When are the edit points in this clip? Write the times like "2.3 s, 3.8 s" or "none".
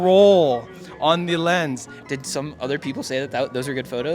2.0 s